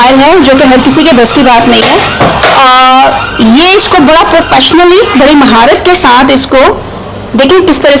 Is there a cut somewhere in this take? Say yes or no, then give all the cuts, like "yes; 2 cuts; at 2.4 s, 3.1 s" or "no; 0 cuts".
no; 0 cuts